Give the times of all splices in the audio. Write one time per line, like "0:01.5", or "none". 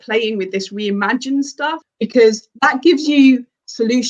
0:01.8